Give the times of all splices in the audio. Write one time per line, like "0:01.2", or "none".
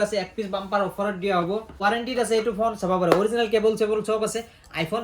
0:01.8